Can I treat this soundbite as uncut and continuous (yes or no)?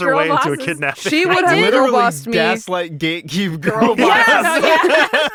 yes